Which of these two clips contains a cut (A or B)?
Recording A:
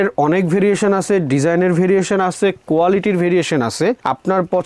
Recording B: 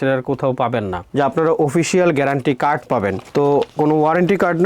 B